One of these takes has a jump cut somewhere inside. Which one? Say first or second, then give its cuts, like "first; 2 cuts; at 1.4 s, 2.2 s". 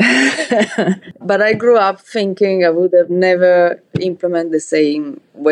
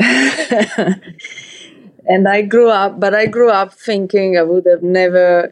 first; 1 cut; at 1.2 s